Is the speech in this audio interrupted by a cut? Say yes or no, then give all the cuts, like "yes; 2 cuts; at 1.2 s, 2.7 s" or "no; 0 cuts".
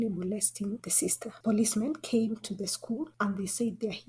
yes; 1 cut; at 1.3 s